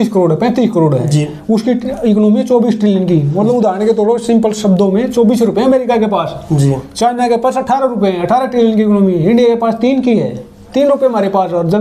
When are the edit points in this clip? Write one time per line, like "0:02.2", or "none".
none